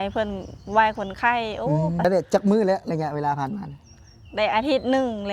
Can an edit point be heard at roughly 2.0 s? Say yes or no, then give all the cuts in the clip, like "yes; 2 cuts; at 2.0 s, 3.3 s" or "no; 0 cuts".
yes; 1 cut; at 2.0 s